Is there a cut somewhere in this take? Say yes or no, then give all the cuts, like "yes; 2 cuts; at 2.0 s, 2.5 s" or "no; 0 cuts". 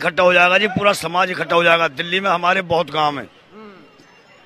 no; 0 cuts